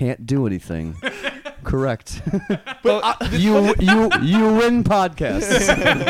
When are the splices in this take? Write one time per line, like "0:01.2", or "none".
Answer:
none